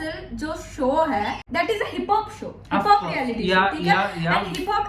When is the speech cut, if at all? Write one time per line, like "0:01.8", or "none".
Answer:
0:01.4